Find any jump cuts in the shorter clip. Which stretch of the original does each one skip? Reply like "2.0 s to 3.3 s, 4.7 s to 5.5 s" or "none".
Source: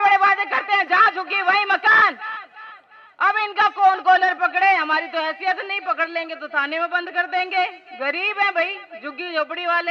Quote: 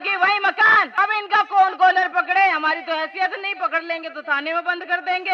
2.2 s to 3.2 s